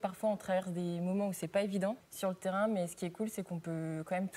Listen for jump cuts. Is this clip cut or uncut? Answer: cut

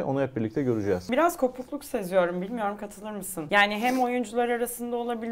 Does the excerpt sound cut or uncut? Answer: cut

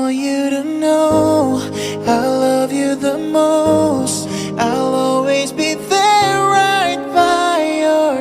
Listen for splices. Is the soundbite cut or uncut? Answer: cut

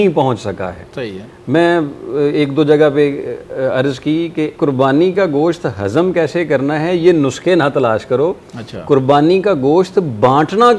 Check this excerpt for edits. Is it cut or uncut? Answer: uncut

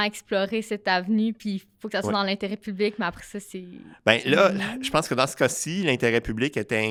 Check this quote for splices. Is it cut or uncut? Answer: uncut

